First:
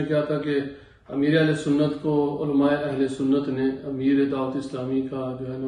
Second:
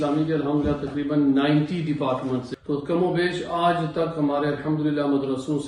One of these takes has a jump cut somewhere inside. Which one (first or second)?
second